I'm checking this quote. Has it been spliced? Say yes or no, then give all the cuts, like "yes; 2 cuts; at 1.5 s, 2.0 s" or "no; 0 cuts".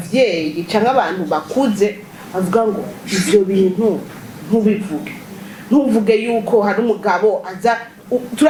no; 0 cuts